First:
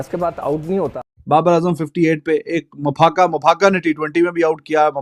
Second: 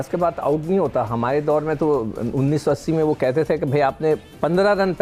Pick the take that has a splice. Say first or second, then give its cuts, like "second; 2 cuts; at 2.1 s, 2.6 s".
first; 1 cut; at 1.2 s